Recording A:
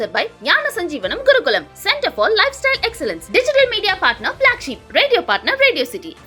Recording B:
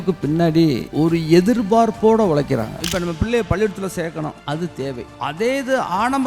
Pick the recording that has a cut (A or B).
B